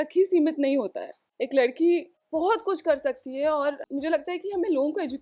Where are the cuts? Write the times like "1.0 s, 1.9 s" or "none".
3.8 s